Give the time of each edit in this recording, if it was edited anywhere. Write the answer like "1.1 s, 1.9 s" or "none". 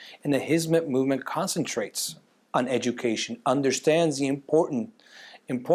none